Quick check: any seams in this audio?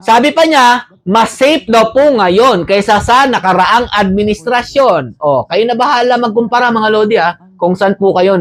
no; 0 cuts

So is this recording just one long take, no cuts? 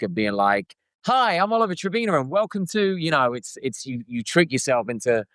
yes; 0 cuts

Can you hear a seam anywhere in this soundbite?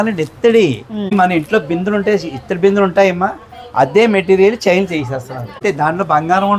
yes; 2 cuts; at 1.1 s, 5.6 s

